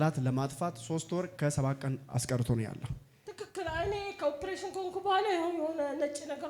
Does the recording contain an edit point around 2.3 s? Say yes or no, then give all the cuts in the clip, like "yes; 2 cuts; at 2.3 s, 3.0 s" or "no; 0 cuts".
no; 0 cuts